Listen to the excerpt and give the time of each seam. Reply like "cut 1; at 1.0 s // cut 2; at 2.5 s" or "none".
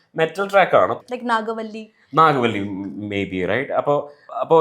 cut 1; at 0.9 s